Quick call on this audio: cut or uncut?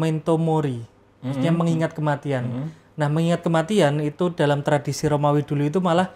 uncut